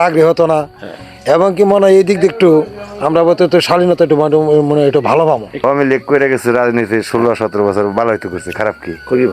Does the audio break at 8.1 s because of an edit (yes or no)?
no